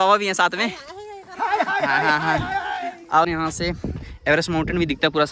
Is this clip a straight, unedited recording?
no; 1 cut; at 3.3 s

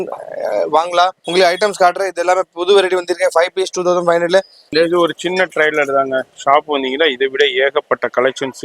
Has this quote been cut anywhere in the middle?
yes; 2 cuts; at 1.2 s, 4.7 s

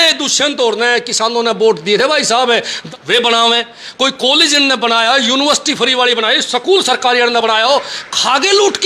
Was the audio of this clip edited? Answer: yes; 1 cut; at 2.8 s

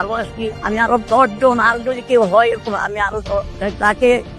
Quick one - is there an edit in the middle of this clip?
no; 0 cuts

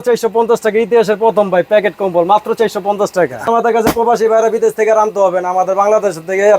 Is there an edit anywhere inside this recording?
yes; 1 cut; at 3.4 s

